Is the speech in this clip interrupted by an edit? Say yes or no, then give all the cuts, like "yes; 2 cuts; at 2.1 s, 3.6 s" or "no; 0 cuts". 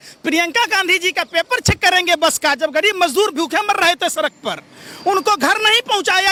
no; 0 cuts